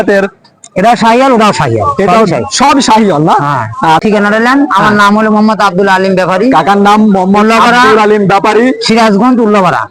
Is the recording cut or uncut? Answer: cut